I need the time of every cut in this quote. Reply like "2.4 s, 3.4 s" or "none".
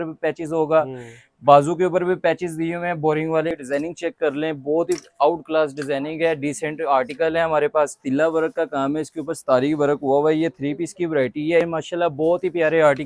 3.5 s, 8.0 s, 11.6 s